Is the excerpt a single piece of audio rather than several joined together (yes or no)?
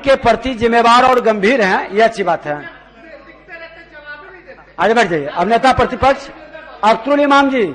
yes